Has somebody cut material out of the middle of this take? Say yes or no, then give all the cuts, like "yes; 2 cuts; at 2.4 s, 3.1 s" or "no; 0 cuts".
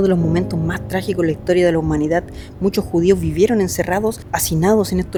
no; 0 cuts